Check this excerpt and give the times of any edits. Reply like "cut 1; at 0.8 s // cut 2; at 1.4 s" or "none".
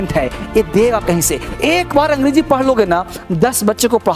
none